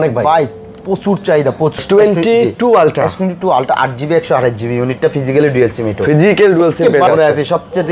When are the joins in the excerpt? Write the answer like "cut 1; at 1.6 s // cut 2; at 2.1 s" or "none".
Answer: cut 1; at 1.8 s // cut 2; at 7.1 s